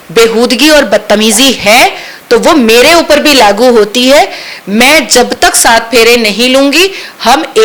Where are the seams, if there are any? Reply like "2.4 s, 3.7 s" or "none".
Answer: none